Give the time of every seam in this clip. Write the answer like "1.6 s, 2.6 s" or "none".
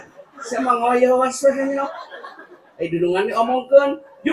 none